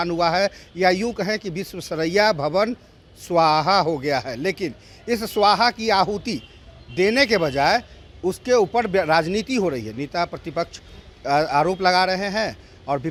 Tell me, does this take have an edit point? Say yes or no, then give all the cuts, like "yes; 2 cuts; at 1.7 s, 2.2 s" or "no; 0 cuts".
no; 0 cuts